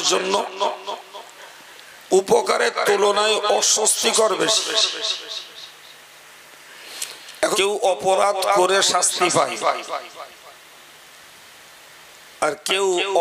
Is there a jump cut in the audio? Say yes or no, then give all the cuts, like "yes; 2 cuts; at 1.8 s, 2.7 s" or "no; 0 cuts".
yes; 1 cut; at 7.6 s